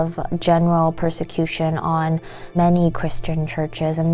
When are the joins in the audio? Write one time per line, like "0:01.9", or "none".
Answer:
0:02.6